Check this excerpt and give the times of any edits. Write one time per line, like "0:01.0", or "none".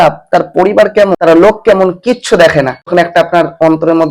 0:01.1
0:02.9